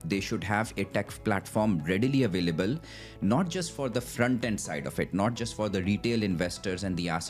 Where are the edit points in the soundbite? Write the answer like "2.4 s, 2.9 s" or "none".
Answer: none